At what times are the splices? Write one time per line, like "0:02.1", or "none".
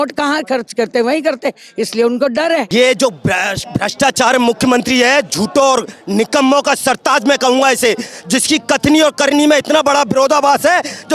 0:02.7